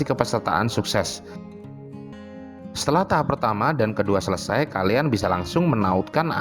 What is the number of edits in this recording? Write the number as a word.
one